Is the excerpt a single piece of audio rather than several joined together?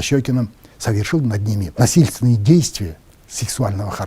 no; 1 cut; at 1.7 s

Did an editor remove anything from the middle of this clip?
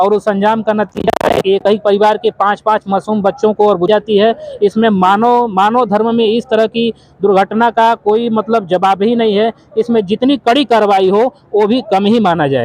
yes; 1 cut; at 3.9 s

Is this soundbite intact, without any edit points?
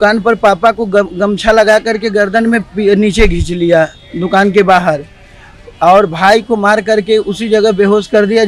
yes; 0 cuts

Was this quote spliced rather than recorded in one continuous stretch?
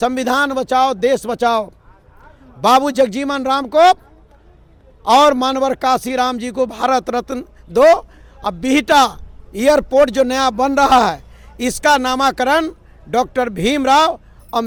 no; 0 cuts

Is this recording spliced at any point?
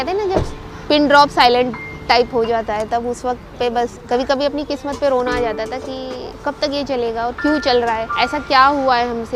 yes; 3 cuts; at 4.0 s, 6.3 s, 8.1 s

